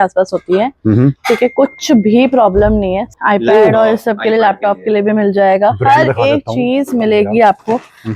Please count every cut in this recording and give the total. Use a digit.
1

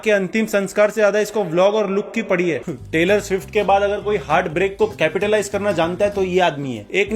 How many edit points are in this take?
1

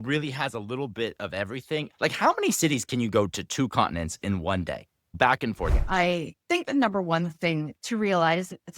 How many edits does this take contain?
2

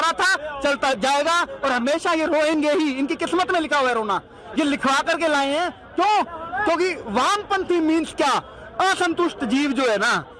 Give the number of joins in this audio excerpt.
0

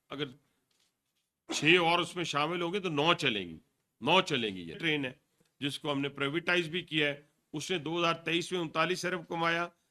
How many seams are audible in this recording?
1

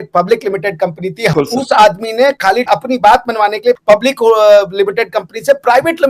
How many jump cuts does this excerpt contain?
2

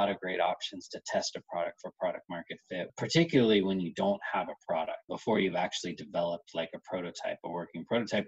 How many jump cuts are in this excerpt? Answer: 1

